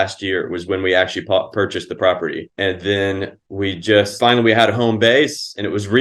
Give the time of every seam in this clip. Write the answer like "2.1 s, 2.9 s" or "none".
2.5 s, 3.4 s, 4.1 s